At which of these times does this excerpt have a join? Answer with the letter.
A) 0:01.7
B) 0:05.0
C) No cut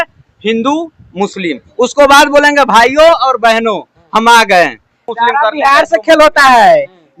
B